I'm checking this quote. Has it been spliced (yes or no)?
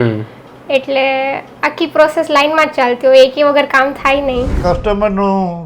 yes